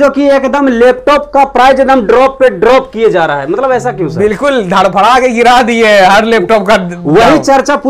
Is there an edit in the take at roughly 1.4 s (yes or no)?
no